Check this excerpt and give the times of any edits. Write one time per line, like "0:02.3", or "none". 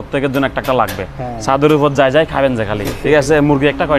none